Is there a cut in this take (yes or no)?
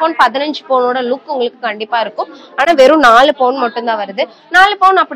no